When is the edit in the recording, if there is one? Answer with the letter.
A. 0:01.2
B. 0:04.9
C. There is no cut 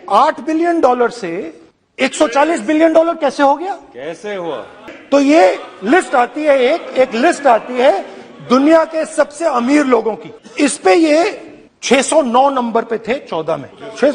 B